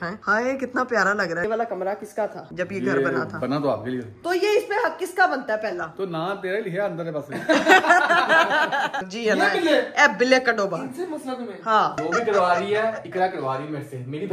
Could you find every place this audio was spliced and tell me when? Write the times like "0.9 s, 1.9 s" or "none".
1.4 s, 2.4 s, 4.2 s, 9.1 s, 12.0 s